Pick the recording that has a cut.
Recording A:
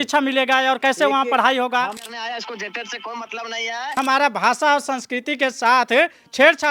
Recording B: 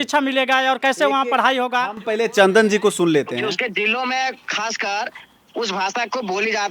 A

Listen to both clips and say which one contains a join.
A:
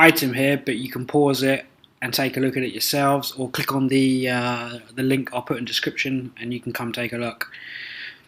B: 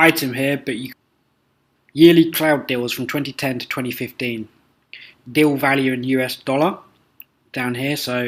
A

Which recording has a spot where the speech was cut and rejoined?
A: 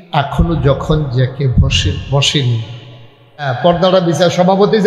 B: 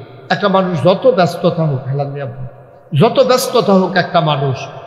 A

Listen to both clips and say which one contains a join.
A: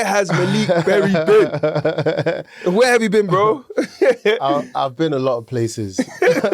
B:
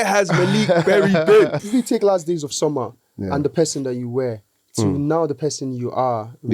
B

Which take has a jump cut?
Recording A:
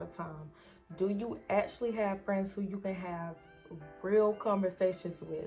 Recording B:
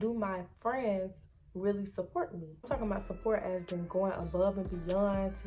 B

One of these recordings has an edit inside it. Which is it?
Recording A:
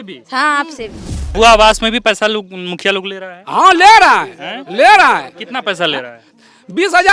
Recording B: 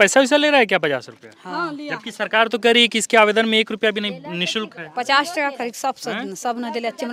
A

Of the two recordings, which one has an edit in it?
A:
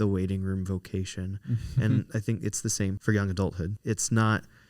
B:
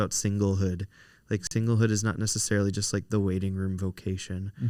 A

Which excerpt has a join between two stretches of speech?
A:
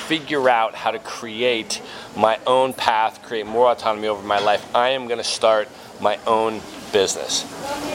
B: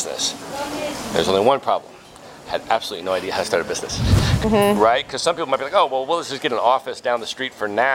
B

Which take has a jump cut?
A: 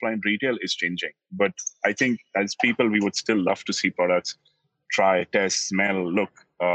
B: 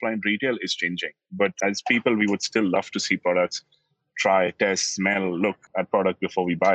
B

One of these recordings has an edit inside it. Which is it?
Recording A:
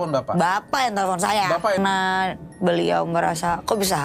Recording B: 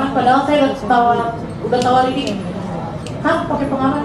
A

